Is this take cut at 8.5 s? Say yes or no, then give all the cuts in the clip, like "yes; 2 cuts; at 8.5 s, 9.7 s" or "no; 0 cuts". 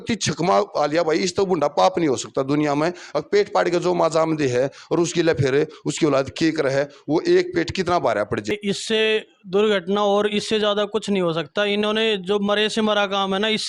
yes; 1 cut; at 8.5 s